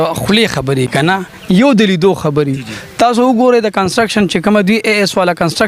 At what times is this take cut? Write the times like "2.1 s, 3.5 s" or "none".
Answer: none